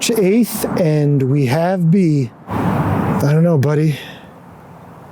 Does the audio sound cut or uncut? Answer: cut